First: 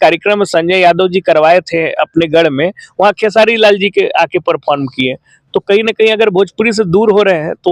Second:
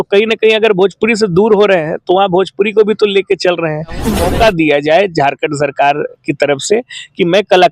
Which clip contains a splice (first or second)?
second